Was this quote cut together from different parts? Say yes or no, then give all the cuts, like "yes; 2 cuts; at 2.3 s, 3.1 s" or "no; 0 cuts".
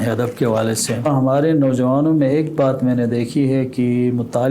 yes; 1 cut; at 1.1 s